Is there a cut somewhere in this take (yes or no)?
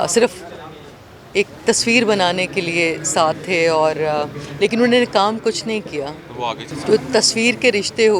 yes